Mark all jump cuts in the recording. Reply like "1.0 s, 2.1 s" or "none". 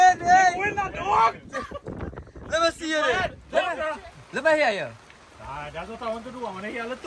3.4 s